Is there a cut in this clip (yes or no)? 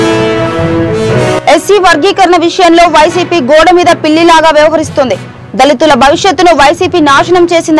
yes